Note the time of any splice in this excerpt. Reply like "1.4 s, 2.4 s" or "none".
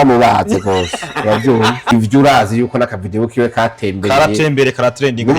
1.9 s